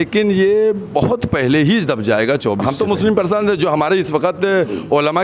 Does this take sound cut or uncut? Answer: cut